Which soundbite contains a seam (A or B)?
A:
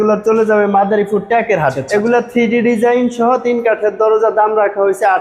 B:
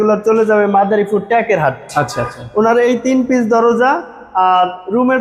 A